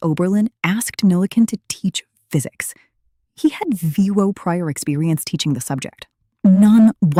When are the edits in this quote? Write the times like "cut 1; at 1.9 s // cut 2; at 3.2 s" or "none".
none